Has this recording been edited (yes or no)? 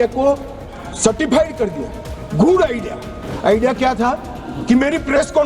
yes